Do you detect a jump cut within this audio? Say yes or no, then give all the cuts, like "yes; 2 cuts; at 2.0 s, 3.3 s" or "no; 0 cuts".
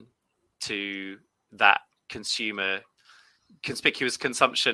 no; 0 cuts